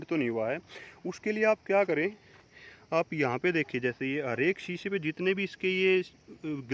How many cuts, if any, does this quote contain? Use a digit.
0